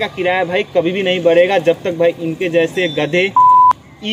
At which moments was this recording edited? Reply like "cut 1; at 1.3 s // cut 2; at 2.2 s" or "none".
none